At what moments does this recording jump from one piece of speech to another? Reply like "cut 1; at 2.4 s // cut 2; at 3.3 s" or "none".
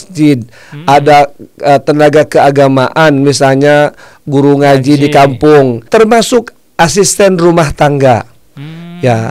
cut 1; at 5.9 s